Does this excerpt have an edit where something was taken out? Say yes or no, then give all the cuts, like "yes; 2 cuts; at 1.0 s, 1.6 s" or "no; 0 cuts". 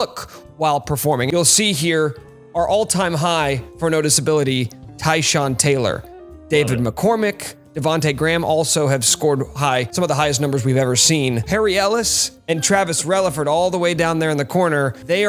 no; 0 cuts